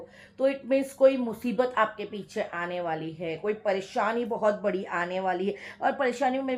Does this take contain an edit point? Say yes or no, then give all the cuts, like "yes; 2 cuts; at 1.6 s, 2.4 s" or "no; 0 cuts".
no; 0 cuts